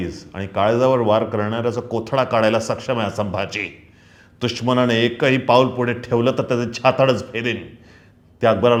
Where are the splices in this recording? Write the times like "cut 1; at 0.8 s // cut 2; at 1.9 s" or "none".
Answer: none